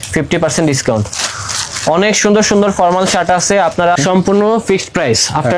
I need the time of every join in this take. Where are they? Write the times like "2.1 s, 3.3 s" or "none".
4.0 s